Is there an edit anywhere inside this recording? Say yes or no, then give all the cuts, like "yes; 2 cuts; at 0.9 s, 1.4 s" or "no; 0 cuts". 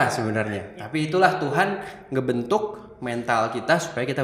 no; 0 cuts